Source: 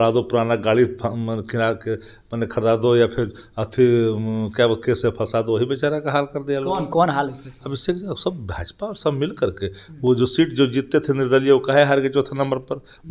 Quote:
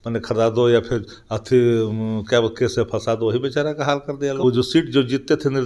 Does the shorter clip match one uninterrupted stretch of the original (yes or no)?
no